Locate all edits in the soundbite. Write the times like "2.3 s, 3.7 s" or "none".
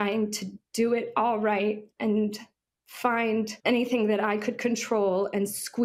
3.5 s